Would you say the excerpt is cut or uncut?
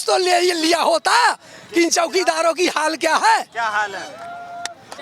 uncut